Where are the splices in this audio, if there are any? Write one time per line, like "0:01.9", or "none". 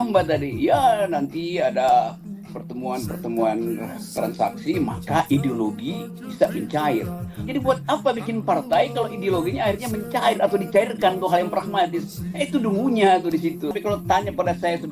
0:07.4
0:13.7